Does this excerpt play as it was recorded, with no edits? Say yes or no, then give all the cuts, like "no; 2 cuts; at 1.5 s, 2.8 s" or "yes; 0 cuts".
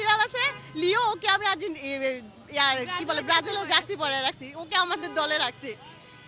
yes; 0 cuts